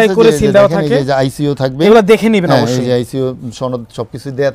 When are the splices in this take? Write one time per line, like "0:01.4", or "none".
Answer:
none